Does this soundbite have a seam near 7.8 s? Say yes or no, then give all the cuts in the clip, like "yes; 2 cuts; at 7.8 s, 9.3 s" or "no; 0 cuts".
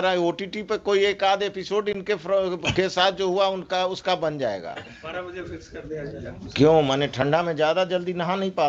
no; 1 cut; at 5.0 s